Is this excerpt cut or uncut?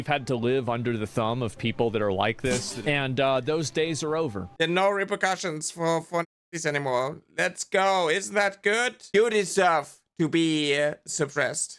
cut